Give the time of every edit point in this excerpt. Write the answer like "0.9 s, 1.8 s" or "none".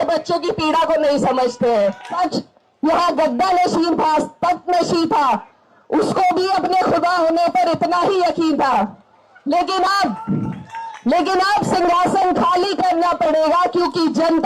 2.1 s